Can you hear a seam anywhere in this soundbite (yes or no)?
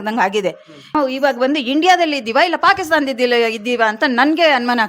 yes